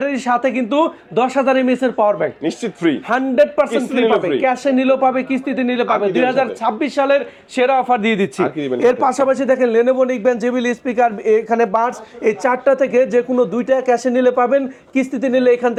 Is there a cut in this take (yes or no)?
no